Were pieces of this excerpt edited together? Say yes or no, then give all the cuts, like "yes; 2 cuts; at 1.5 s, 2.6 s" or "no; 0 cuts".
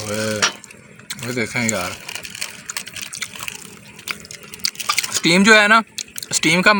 no; 0 cuts